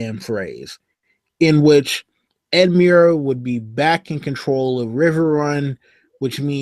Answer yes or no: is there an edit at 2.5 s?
no